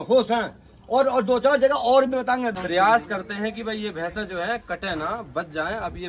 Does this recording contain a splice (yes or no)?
yes